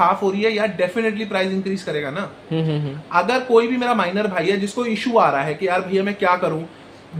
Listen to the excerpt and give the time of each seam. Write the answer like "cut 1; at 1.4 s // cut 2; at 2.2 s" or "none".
none

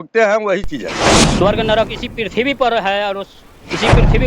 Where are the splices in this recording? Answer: cut 1; at 1.1 s

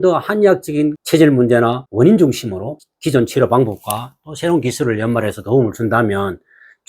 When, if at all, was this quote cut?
cut 1; at 1.0 s // cut 2; at 1.8 s // cut 3; at 2.8 s

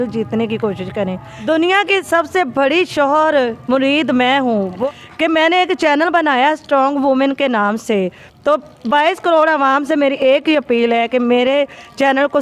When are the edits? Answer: cut 1; at 1.3 s // cut 2; at 4.9 s

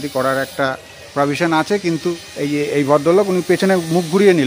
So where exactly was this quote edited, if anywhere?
cut 1; at 2.3 s

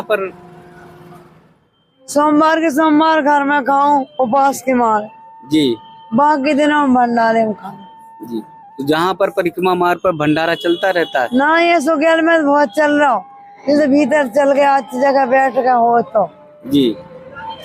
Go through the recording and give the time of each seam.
none

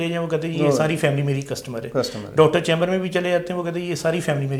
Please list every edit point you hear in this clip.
none

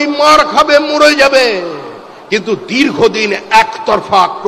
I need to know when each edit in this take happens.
none

